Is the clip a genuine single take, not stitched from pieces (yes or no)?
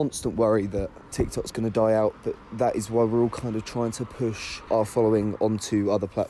no